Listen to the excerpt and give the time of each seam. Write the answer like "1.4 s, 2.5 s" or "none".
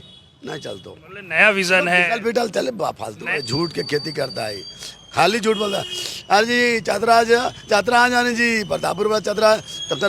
3.3 s